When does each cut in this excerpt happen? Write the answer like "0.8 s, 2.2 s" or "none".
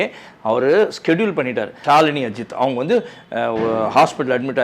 1.7 s

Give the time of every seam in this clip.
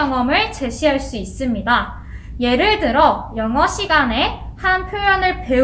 2.0 s

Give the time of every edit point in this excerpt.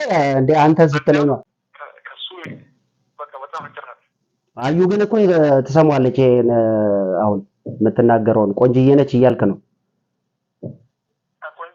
1.6 s

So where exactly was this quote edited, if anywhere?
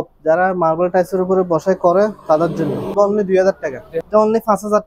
2.9 s, 3.9 s

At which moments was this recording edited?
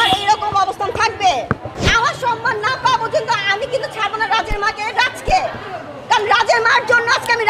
1.8 s

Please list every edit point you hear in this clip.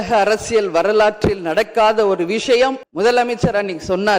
2.8 s

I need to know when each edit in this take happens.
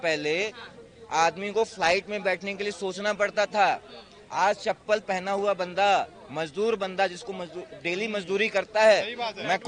none

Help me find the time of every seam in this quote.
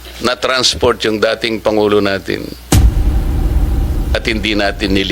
none

